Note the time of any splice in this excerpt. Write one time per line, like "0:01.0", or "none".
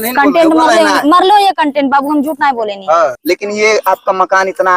0:03.2